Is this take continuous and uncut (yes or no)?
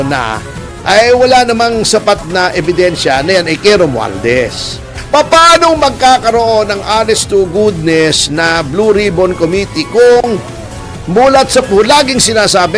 no